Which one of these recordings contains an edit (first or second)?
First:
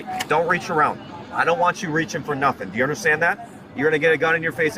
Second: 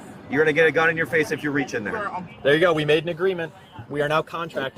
second